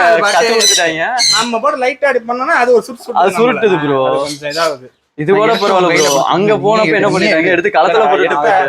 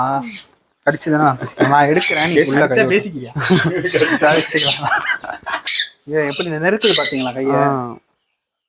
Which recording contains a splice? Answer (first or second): second